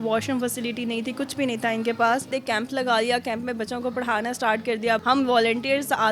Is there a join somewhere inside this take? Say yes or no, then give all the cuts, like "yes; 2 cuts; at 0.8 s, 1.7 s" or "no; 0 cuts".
yes; 2 cuts; at 2.4 s, 5.0 s